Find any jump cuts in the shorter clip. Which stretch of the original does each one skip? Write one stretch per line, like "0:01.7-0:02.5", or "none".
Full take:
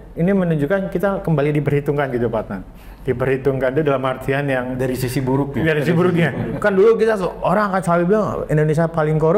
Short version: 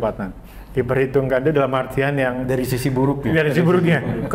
none

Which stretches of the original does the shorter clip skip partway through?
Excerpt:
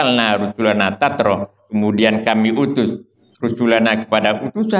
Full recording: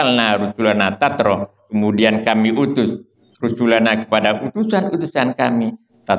none

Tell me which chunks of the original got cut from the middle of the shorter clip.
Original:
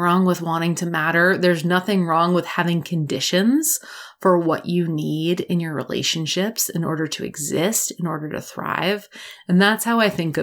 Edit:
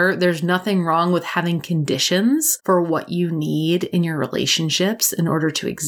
0:03.7-0:04.1

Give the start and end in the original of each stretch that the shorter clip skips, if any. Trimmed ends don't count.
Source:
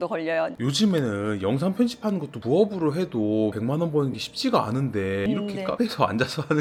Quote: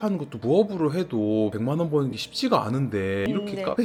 none

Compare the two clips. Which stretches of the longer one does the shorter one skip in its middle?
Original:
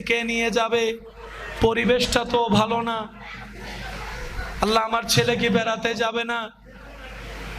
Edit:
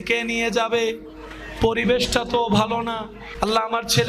0:03.2-0:04.4

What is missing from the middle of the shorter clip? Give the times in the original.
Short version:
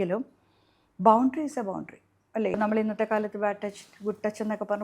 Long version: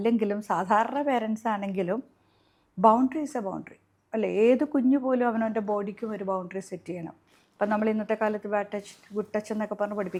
0:04.3-0:07.7

